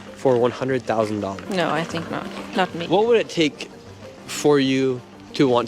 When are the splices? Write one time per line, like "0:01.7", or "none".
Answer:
0:01.4
0:02.8